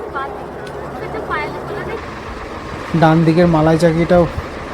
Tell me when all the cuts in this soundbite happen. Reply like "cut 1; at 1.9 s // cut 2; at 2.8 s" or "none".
cut 1; at 2.0 s